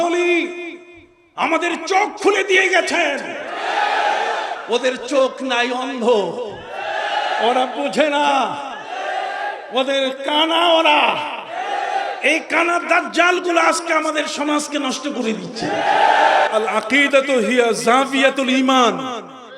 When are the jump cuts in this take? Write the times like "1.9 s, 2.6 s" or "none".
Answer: 4.6 s, 16.5 s